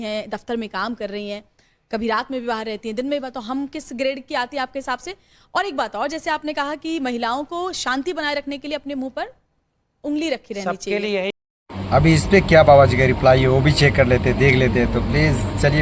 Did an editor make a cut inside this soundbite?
no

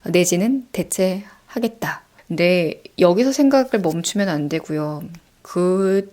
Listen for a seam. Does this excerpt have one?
yes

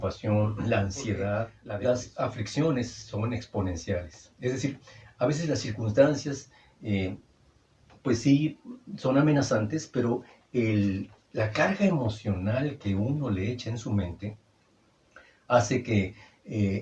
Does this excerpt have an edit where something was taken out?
yes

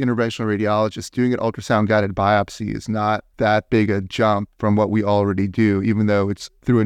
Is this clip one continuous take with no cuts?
yes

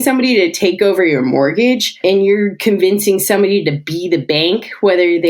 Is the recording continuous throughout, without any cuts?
no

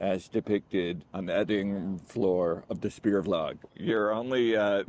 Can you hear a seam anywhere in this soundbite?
yes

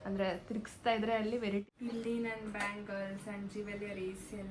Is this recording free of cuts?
no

